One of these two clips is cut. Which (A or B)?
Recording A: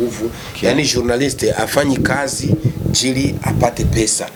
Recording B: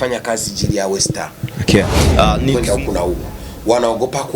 B